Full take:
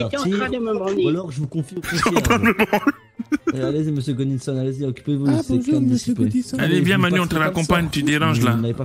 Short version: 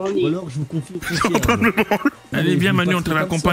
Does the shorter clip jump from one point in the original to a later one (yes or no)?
yes